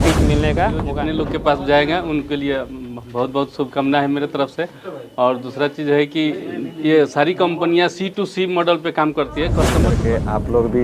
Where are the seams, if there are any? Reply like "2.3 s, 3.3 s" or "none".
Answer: 1.0 s, 9.9 s